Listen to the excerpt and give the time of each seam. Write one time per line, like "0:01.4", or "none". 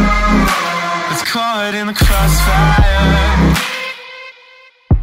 0:01.1